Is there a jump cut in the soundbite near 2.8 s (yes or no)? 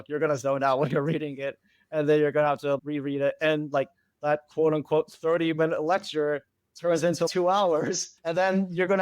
yes